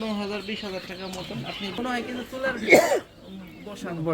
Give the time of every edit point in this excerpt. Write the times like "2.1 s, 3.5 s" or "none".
1.8 s

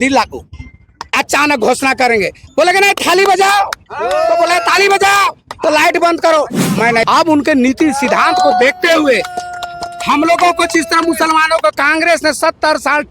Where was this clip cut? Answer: 7.0 s

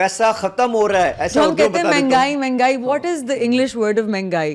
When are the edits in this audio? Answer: none

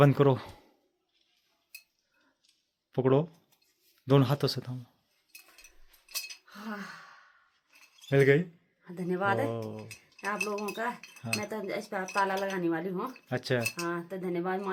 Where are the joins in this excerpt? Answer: none

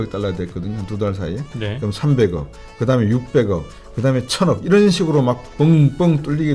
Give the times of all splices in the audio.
none

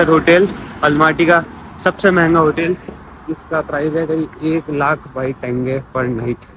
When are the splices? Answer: none

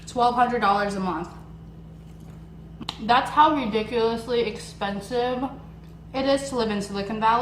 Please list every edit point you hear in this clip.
2.8 s

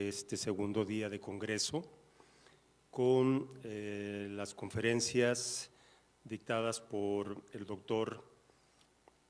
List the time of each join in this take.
5.7 s

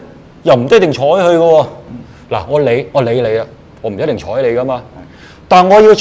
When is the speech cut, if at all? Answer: none

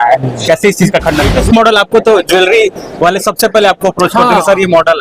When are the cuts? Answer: 1.4 s

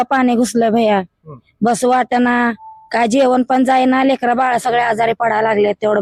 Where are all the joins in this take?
none

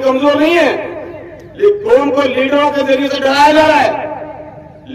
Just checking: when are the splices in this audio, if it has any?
none

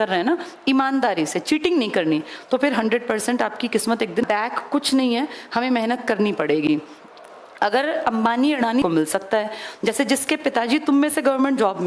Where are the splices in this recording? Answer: 4.2 s, 8.8 s

